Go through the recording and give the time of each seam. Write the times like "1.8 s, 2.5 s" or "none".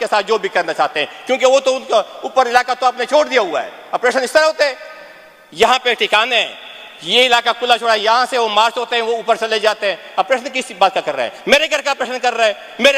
none